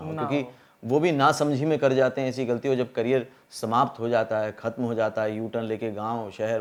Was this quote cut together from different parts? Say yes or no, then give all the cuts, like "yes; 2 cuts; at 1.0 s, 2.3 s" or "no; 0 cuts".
no; 0 cuts